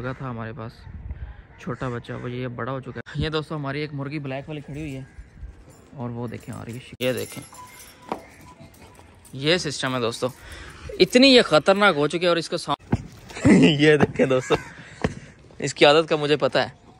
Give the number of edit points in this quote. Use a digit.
3